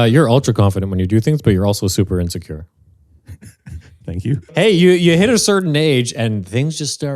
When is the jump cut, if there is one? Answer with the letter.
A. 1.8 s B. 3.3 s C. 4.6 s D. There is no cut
C